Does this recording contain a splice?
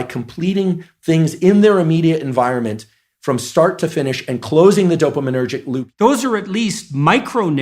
yes; 1 cut; at 5.8 s

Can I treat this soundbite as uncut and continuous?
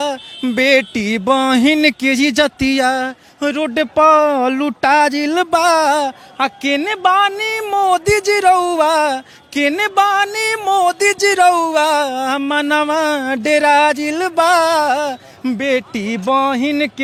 yes; 0 cuts

